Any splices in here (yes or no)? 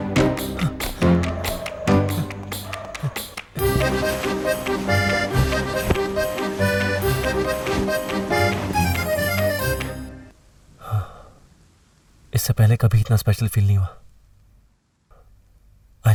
no